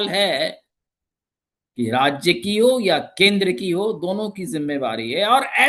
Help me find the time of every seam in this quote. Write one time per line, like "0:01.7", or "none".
none